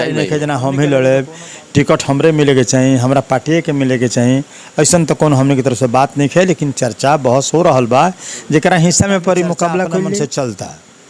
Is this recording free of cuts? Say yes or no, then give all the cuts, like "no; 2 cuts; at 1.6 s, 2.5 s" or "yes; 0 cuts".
no; 1 cut; at 10.2 s